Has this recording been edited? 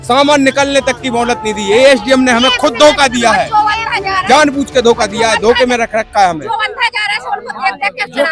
no; 0 cuts

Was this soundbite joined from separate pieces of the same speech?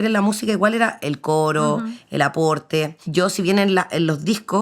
yes; 1 cut; at 3.0 s

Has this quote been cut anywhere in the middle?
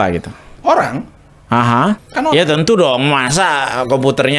yes; 1 cut; at 2.1 s

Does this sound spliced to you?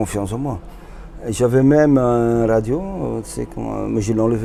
no; 0 cuts

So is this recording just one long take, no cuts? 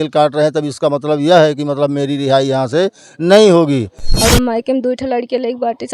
no; 1 cut; at 4.0 s

